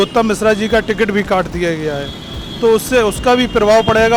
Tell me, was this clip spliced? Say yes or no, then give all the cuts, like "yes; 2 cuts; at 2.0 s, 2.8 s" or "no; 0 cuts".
no; 0 cuts